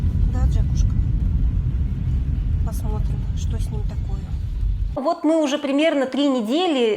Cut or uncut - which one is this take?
cut